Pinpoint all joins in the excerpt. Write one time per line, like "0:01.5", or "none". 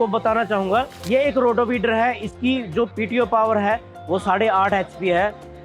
none